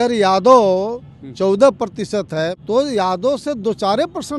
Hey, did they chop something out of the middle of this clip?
yes; 1 cut; at 2.6 s

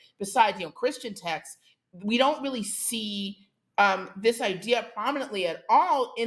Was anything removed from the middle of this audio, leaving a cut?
no; 0 cuts

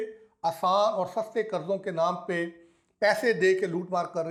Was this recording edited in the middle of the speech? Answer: no; 0 cuts

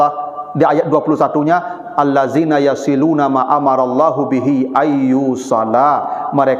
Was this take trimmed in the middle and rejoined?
no; 0 cuts

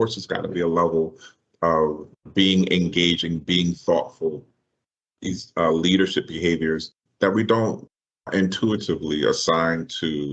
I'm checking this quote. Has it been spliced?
yes; 1 cut; at 2.1 s

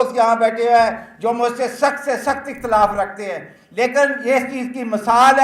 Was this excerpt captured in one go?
yes; 0 cuts

